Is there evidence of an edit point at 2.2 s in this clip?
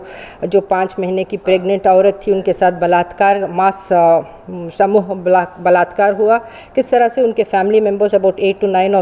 no; 0 cuts

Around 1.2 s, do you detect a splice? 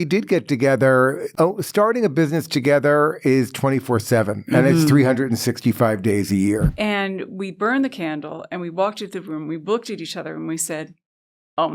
yes; 2 cuts; at 1.2 s, 6.7 s

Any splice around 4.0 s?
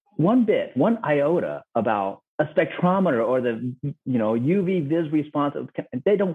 no; 0 cuts

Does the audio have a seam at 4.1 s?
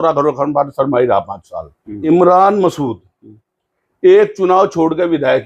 no; 1 cut; at 2.0 s

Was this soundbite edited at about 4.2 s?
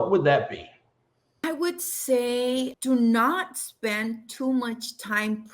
no; 2 cuts; at 1.4 s, 2.8 s

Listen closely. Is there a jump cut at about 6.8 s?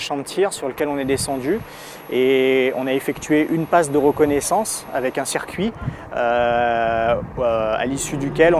yes; 1 cut; at 6.8 s

